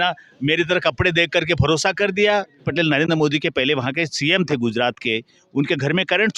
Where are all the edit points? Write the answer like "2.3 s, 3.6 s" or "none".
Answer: 2.7 s